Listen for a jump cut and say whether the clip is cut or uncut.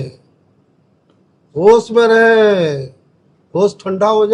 uncut